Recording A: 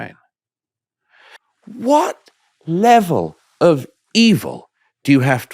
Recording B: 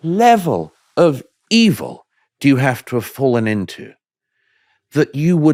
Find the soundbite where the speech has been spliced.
A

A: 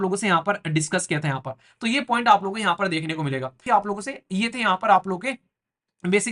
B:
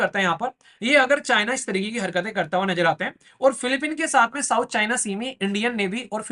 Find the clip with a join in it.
A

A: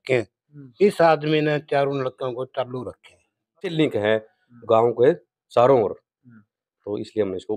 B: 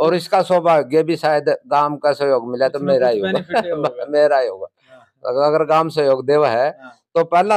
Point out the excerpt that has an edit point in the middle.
A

